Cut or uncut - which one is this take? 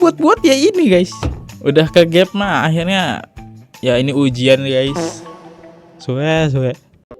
uncut